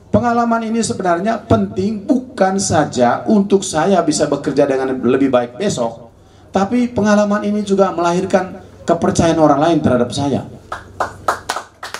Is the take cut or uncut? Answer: uncut